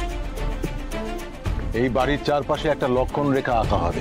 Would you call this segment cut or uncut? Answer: cut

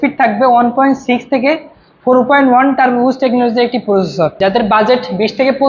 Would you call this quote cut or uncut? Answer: cut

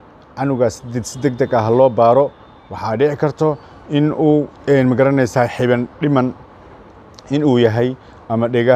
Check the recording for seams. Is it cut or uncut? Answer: cut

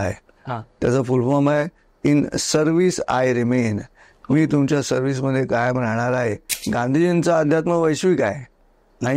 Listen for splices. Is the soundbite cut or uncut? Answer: cut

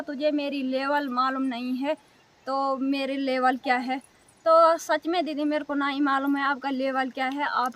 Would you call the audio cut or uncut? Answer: uncut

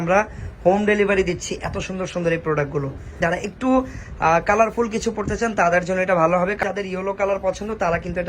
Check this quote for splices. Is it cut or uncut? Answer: cut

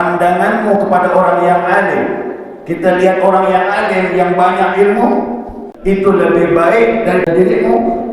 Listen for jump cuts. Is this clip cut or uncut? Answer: cut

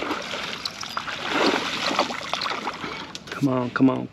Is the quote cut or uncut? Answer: cut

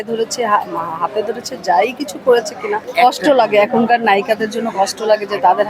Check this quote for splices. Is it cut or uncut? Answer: cut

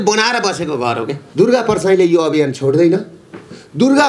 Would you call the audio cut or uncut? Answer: cut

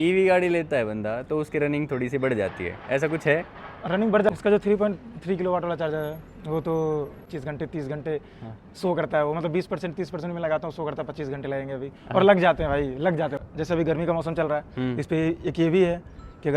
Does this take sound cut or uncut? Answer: cut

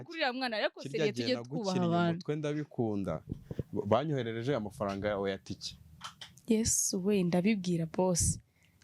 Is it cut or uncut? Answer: uncut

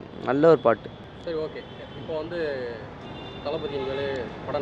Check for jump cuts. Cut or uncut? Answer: uncut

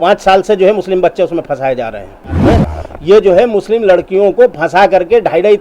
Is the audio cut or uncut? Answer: cut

